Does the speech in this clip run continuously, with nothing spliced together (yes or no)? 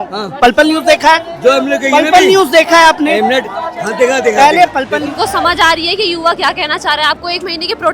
no